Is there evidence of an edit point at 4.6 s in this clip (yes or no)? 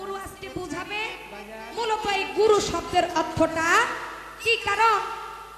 no